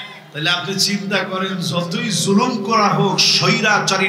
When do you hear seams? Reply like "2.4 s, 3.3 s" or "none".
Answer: none